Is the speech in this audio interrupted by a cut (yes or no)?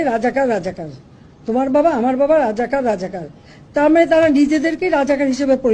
no